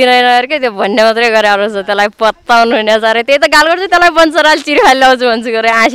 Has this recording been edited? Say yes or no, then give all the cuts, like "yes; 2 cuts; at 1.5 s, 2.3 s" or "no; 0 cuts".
no; 0 cuts